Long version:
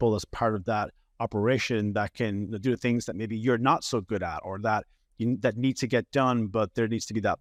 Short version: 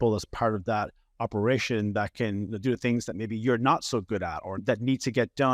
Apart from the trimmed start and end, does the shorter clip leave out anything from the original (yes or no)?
yes